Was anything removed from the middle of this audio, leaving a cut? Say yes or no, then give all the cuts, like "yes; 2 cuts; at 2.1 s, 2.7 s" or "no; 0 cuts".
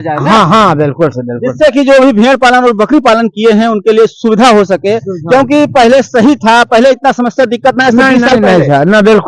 no; 0 cuts